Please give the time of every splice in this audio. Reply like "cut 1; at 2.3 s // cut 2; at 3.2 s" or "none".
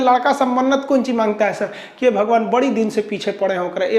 none